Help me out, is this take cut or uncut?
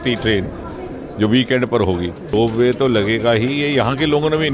cut